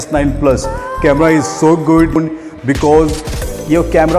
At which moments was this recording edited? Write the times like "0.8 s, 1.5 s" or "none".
2.2 s